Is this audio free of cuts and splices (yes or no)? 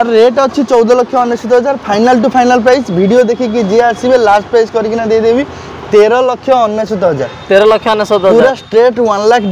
yes